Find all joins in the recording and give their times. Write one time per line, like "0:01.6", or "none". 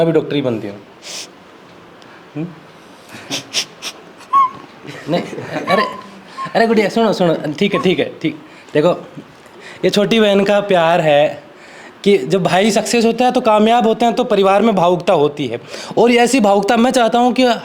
none